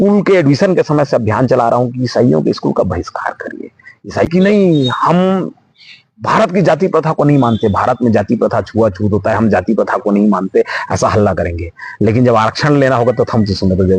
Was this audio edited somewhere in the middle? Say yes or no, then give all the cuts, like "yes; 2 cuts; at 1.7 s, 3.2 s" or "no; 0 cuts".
yes; 1 cut; at 4.3 s